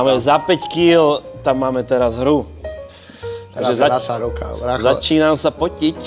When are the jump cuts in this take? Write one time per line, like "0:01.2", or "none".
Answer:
none